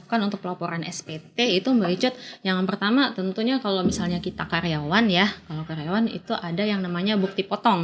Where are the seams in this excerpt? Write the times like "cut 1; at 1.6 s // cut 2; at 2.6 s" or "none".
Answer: none